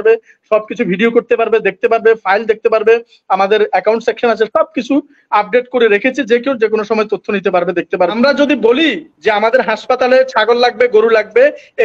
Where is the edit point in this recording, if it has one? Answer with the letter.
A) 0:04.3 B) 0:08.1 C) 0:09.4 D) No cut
B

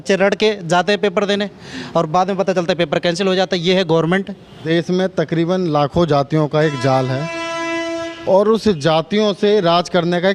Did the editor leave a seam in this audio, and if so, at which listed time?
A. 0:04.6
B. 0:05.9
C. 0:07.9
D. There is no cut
A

